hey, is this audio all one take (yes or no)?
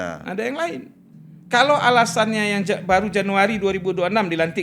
yes